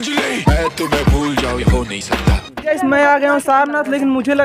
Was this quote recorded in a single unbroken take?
no; 1 cut; at 2.5 s

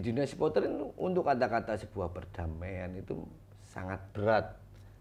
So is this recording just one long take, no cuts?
yes; 0 cuts

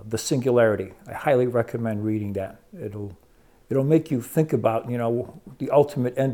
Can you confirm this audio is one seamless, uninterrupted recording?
yes; 0 cuts

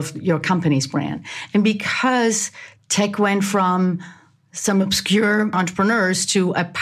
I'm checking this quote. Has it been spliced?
yes; 1 cut; at 5.5 s

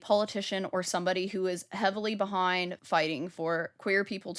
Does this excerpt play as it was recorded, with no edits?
no; 1 cut; at 2.8 s

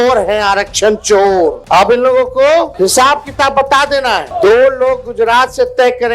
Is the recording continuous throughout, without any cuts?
no; 3 cuts; at 1.6 s, 2.7 s, 4.3 s

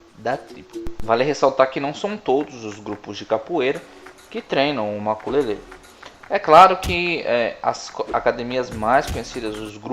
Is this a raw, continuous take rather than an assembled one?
no; 1 cut; at 8.4 s

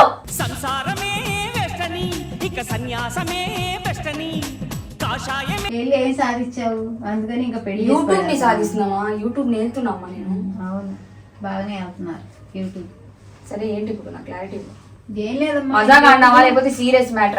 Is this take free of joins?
yes; 0 cuts

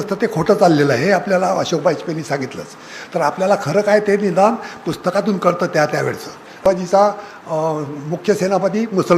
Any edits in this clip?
yes; 1 cut; at 6.6 s

